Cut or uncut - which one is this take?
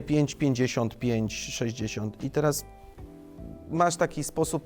uncut